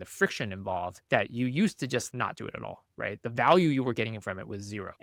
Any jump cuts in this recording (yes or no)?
no